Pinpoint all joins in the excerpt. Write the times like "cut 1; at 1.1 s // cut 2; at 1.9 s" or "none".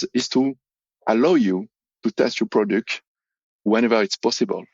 cut 1; at 3.7 s